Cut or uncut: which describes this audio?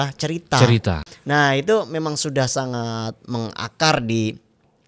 cut